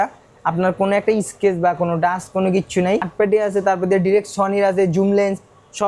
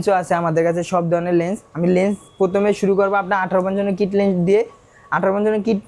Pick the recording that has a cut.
first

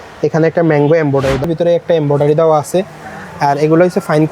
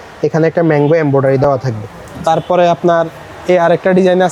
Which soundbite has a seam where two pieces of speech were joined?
first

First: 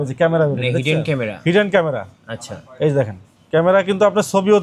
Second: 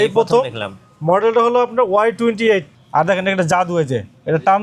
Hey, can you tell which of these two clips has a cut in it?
second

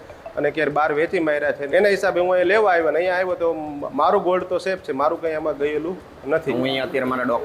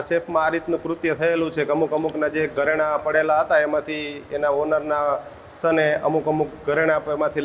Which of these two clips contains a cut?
first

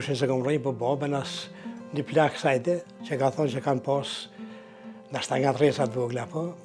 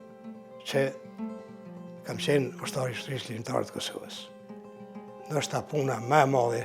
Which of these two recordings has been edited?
second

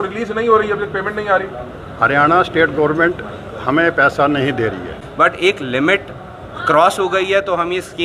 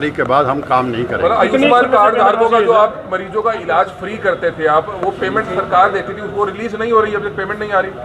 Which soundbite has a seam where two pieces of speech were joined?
first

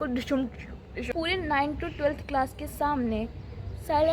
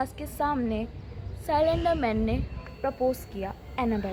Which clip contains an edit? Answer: first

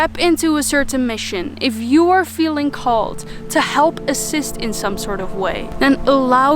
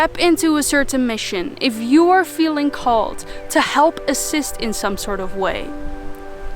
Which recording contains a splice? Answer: first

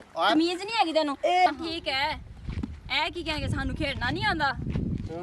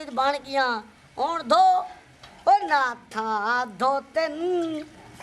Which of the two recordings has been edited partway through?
first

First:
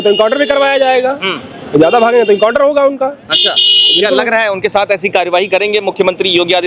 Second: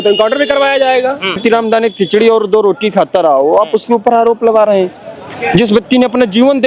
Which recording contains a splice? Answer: second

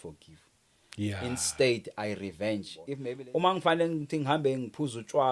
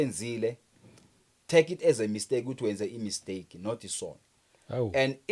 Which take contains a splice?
first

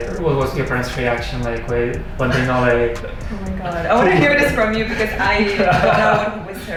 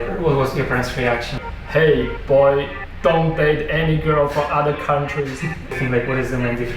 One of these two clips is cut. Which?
second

